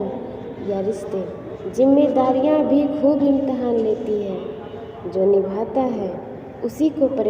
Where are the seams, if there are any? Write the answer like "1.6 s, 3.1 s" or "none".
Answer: 1.5 s